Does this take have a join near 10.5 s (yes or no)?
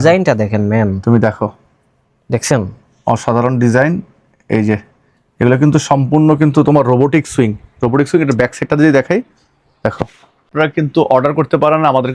yes